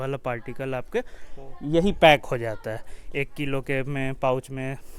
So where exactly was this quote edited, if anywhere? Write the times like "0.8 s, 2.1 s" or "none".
none